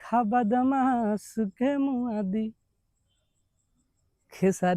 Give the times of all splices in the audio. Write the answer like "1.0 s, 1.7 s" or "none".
none